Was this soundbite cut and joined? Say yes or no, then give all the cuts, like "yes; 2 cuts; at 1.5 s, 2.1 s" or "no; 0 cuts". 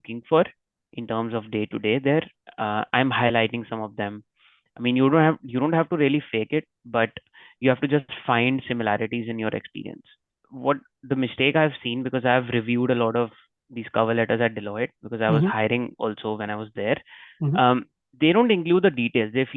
yes; 1 cut; at 10.4 s